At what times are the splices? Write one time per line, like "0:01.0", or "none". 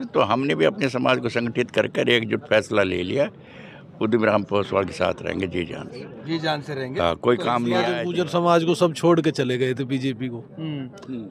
0:08.0